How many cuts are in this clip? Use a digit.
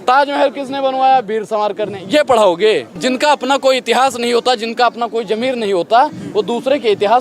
1